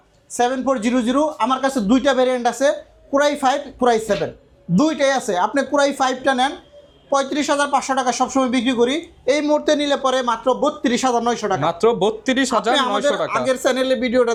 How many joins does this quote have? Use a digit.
0